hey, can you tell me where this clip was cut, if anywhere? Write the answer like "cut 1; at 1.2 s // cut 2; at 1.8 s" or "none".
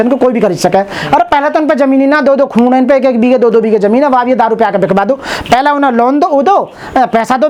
none